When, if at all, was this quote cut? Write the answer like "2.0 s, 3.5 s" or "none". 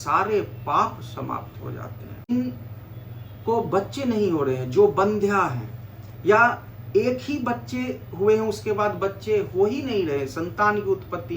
2.3 s